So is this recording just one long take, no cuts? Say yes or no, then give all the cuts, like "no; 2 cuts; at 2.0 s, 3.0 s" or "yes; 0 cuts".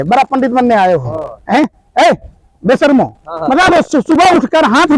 yes; 0 cuts